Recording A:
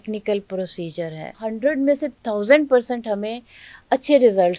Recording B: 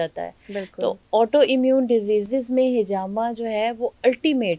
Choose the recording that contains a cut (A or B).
A